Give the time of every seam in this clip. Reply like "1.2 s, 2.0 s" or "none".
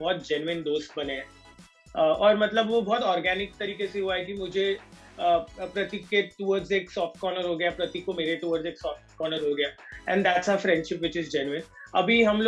none